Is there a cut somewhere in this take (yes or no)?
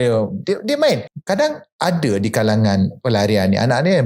yes